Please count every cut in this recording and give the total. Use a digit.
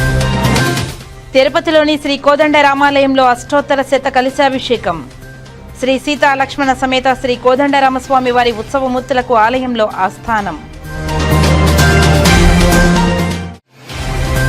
1